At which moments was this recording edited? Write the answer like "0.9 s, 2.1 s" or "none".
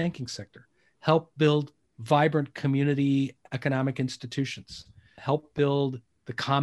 5.1 s